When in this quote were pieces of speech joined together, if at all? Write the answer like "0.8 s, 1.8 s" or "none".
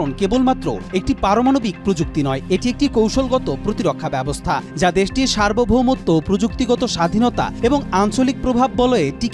none